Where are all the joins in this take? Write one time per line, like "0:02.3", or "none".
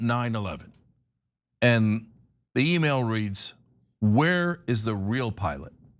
none